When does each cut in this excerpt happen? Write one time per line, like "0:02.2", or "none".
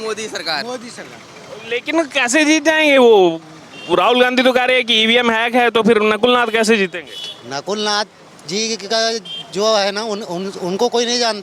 none

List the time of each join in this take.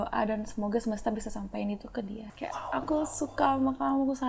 0:02.3

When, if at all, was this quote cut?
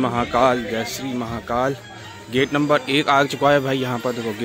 none

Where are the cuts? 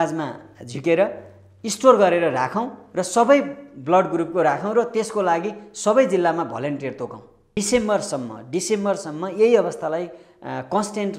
0:07.4

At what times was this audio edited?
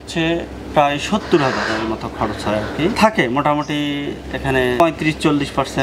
0:02.9

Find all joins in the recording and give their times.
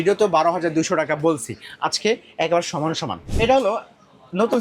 0:03.3

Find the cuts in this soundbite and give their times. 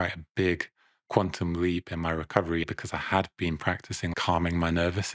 0:02.7
0:04.2

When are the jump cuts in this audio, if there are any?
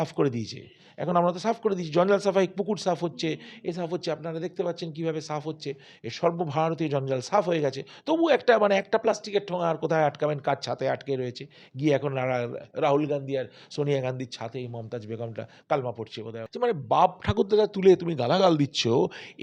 0:16.4

